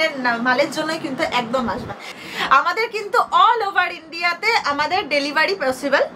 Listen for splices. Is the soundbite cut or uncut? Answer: cut